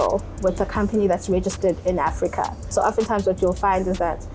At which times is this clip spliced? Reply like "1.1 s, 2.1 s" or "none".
2.7 s